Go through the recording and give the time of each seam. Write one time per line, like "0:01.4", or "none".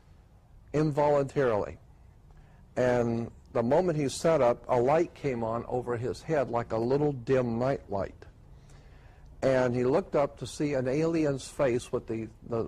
0:07.6